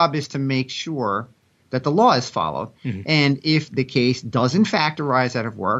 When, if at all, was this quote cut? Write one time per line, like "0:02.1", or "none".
none